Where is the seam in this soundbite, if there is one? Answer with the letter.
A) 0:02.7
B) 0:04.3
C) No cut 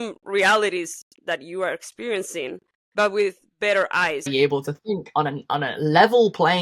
B